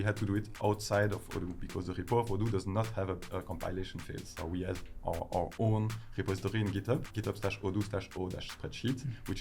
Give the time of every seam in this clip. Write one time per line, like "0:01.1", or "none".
0:04.4
0:07.1

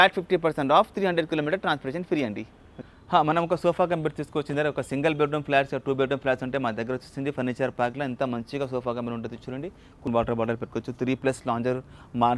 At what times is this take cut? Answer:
0:03.1
0:10.1

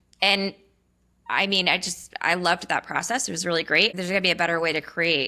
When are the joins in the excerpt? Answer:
0:03.9

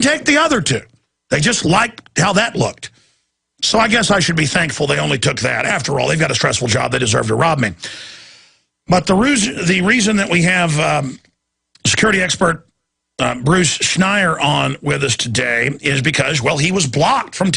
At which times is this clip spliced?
0:11.6

